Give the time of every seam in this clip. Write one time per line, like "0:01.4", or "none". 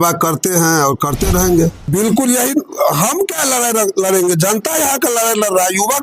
0:01.8